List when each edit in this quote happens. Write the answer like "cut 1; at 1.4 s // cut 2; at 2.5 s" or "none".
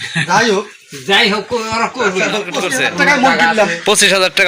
cut 1; at 2.6 s